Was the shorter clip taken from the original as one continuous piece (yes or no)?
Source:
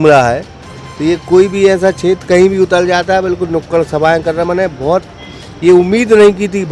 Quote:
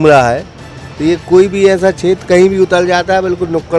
yes